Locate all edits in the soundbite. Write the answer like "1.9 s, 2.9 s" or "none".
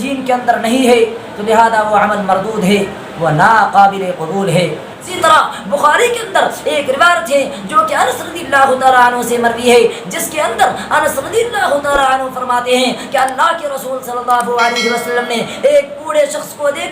5.0 s